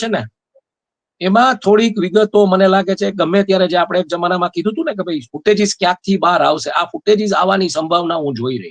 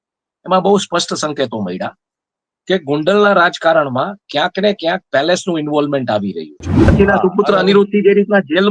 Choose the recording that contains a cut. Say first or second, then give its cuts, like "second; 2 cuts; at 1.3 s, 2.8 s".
second; 1 cut; at 6.9 s